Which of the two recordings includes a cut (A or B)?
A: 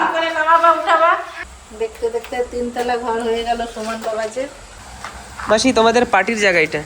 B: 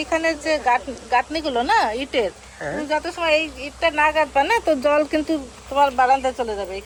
A